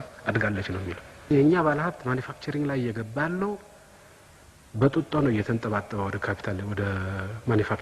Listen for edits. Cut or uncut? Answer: cut